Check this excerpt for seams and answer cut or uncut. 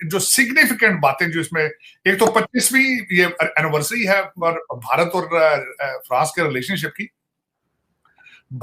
uncut